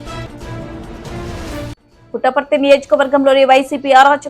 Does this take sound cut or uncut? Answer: cut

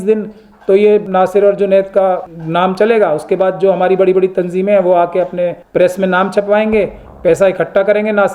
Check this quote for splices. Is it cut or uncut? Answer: cut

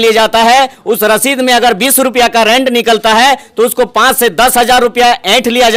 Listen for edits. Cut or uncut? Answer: uncut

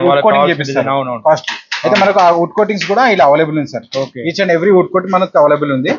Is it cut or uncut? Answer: uncut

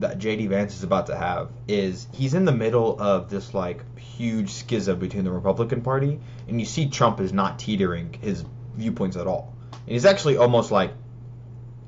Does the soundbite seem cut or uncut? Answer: uncut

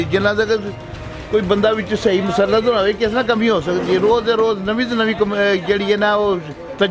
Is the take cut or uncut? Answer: uncut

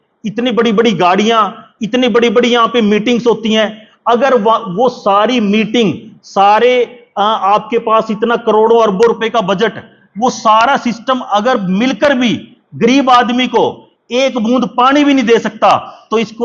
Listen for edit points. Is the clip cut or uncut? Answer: uncut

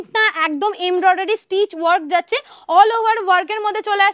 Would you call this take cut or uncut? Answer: uncut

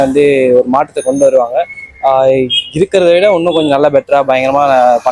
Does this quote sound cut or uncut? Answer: uncut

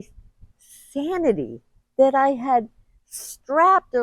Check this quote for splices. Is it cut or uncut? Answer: uncut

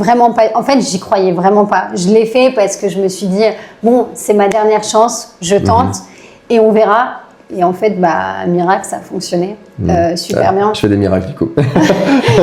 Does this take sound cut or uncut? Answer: uncut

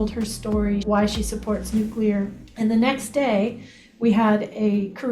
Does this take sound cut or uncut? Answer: cut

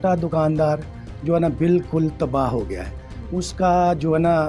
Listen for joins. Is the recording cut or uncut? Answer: uncut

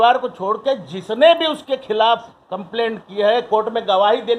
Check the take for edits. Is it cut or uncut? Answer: uncut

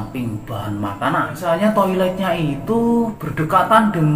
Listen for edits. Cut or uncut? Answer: cut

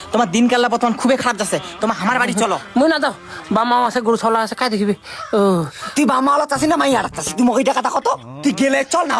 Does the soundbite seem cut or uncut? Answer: uncut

